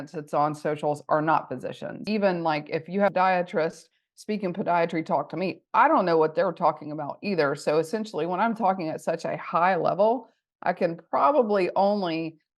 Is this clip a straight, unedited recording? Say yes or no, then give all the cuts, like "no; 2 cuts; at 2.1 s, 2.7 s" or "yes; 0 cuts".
no; 1 cut; at 2.0 s